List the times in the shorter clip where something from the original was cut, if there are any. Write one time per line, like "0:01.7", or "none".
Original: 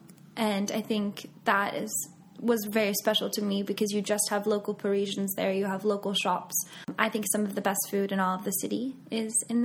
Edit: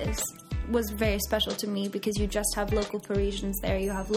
none